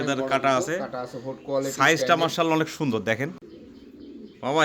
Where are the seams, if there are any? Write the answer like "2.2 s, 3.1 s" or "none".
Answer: 3.5 s